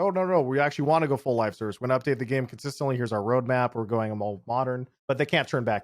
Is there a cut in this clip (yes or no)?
yes